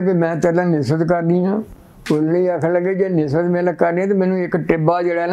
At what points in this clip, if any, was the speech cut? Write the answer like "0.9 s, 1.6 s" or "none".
none